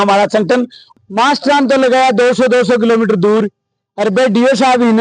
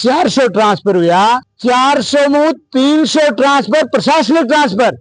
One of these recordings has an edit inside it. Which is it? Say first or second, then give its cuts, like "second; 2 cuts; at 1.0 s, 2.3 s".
first; 1 cut; at 1.0 s